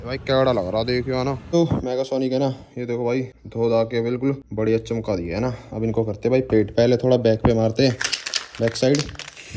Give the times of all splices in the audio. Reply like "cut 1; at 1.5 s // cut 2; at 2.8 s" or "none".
cut 1; at 1.5 s // cut 2; at 3.4 s // cut 3; at 4.5 s